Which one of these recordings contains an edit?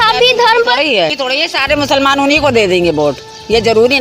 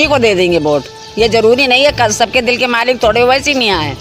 first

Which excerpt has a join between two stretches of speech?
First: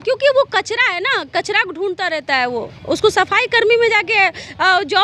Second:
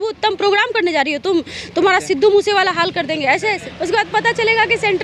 second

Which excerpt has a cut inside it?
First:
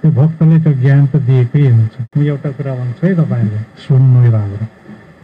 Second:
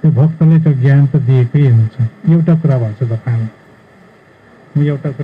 first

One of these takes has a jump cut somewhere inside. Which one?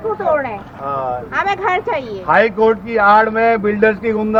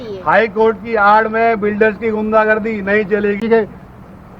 second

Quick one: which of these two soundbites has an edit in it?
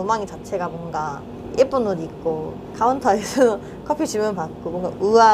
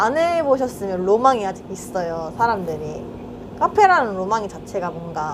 first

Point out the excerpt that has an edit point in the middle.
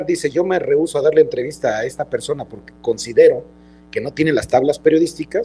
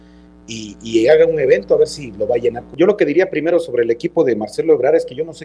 second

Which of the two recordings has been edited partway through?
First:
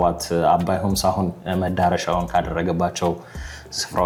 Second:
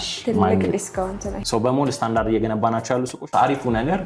second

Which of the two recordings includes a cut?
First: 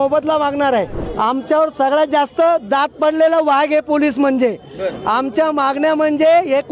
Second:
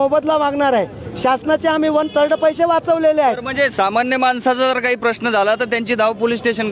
first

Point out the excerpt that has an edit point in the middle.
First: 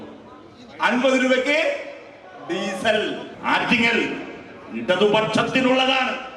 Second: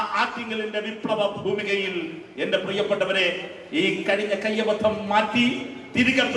first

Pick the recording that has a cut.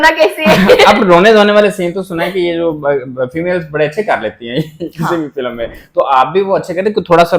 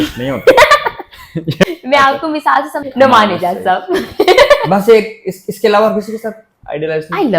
second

